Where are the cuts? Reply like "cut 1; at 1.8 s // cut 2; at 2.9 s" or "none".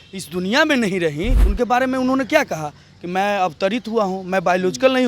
cut 1; at 1.4 s